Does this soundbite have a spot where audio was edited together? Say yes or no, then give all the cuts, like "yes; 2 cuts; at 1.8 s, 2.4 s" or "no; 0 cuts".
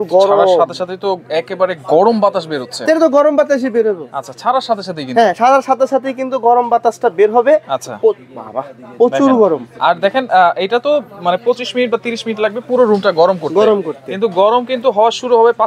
no; 0 cuts